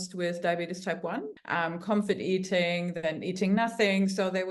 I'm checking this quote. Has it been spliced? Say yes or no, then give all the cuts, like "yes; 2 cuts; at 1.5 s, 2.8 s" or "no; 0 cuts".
yes; 1 cut; at 1.3 s